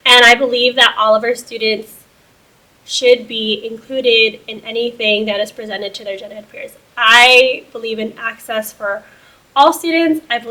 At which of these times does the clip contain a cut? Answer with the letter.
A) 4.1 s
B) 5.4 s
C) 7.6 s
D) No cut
D